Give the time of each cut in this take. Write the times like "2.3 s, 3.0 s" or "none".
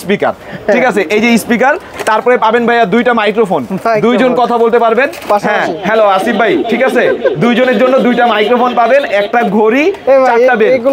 none